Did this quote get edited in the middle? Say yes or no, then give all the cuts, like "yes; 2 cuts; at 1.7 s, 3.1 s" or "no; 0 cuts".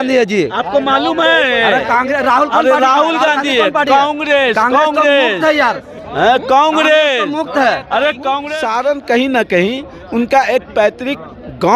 yes; 1 cut; at 8.5 s